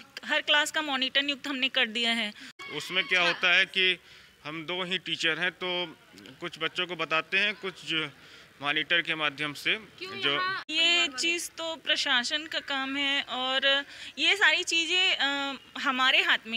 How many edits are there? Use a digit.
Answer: 2